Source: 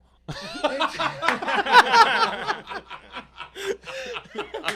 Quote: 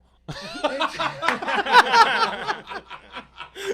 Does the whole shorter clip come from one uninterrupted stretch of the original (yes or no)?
yes